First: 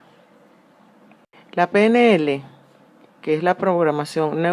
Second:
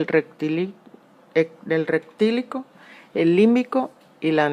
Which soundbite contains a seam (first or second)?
first